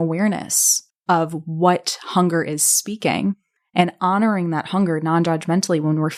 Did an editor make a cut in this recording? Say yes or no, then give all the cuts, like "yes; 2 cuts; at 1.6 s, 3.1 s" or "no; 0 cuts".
no; 0 cuts